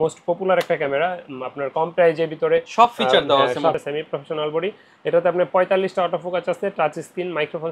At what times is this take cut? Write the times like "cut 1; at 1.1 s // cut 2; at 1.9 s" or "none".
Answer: cut 1; at 3.7 s